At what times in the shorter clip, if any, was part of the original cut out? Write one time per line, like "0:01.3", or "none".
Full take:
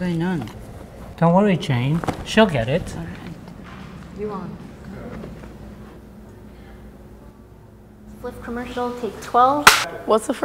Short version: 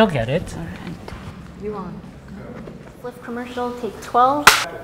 0:01.1
0:02.9

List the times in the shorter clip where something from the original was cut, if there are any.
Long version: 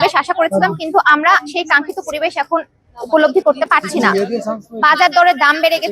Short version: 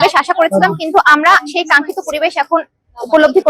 none

